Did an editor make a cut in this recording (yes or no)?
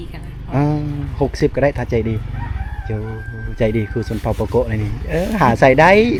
no